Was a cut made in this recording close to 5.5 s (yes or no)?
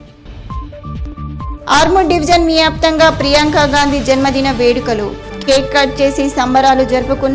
no